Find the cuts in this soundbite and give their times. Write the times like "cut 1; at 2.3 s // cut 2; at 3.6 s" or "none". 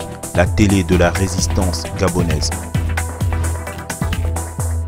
cut 1; at 2.5 s